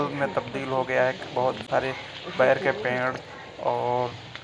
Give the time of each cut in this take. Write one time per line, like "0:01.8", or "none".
none